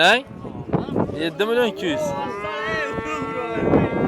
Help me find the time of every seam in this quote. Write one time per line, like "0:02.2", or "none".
none

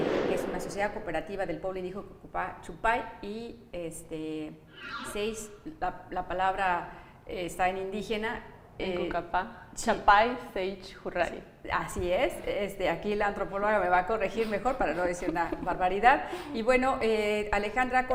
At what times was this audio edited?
none

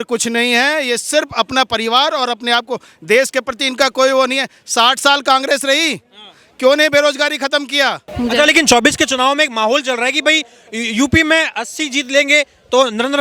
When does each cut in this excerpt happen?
0:08.0

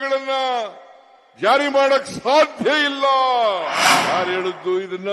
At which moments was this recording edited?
0:03.9

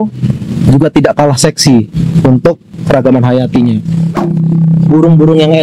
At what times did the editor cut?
0:04.2

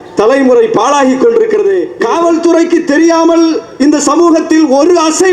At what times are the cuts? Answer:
0:01.9

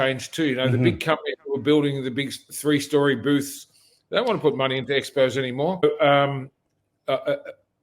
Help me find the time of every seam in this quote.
0:05.8

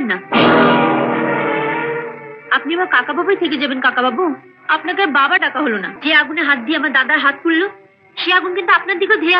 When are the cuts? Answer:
0:05.9

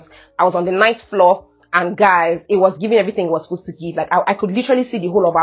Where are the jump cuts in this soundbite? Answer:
none

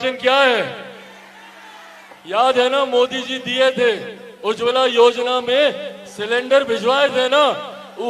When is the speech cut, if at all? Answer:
none

